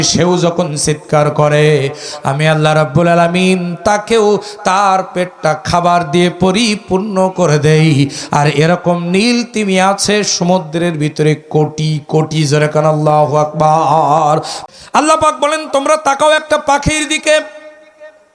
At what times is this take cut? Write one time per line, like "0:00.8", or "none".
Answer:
0:14.5